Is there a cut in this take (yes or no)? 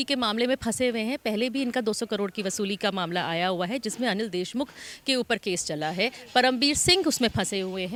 no